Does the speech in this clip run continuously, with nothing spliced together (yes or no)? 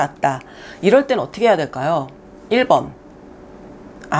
yes